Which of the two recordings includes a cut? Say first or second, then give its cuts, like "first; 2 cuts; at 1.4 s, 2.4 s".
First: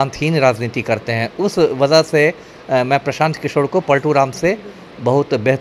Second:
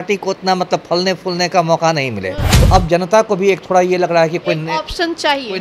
second; 1 cut; at 2.6 s